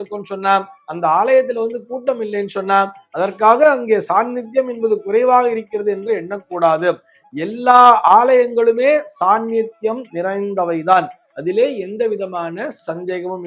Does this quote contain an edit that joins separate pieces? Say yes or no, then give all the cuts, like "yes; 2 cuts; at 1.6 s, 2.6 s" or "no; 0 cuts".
no; 0 cuts